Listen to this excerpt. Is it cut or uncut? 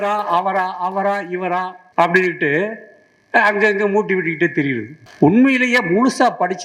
cut